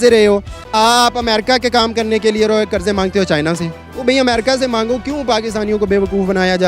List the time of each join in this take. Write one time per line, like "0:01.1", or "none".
none